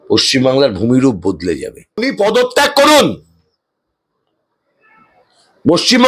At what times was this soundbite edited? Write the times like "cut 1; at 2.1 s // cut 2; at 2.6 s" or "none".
cut 1; at 2.1 s